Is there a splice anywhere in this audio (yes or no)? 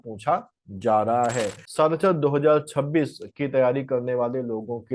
yes